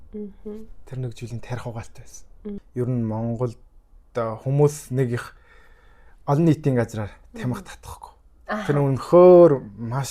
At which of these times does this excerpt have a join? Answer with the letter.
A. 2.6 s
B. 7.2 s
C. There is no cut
A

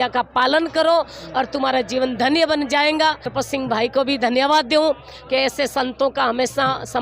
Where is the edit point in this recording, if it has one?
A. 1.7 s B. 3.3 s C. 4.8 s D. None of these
B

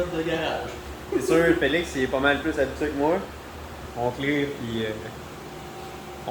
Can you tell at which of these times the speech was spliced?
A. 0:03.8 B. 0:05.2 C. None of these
A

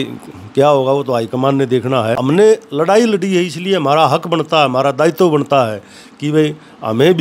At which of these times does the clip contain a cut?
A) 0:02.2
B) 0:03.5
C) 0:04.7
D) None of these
A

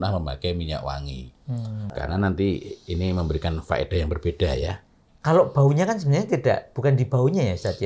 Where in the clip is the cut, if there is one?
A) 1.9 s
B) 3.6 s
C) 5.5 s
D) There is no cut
A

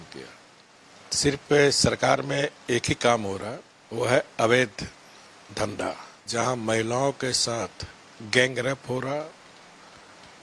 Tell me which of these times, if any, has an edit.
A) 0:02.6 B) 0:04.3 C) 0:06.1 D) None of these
C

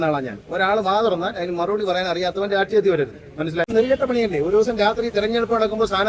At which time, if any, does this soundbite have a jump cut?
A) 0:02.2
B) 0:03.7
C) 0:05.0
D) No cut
B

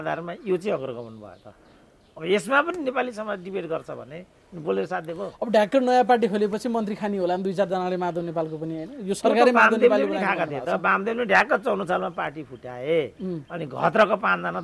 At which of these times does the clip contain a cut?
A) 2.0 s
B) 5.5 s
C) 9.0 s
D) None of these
D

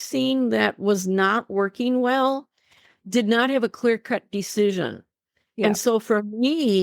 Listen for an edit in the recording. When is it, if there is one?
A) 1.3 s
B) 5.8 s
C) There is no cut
C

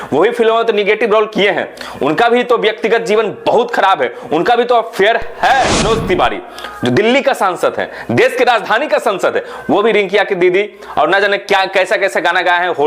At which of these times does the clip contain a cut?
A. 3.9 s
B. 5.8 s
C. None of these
B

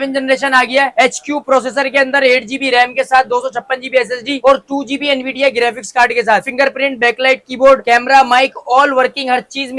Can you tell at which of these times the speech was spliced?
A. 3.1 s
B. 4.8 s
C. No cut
C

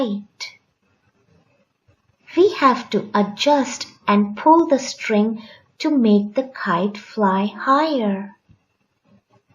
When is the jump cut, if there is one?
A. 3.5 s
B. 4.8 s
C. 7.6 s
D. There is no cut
A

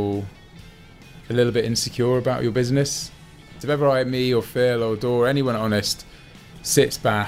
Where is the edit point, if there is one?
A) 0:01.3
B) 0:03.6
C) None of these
B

